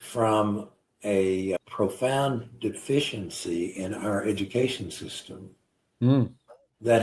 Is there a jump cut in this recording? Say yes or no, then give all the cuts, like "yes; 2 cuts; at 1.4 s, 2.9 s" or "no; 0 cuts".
yes; 1 cut; at 1.6 s